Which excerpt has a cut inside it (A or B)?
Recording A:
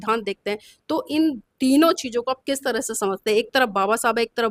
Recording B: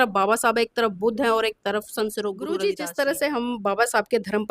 B